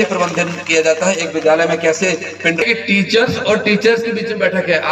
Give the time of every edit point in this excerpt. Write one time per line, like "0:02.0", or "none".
0:02.6